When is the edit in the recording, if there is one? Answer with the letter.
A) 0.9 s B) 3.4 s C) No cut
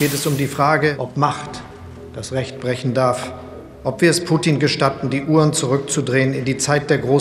A